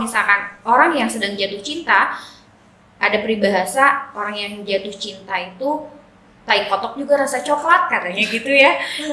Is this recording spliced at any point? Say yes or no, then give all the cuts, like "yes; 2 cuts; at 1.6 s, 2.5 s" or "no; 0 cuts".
no; 0 cuts